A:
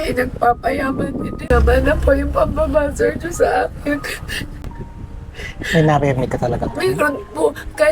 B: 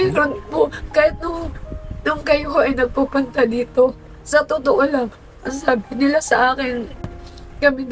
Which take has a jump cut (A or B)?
A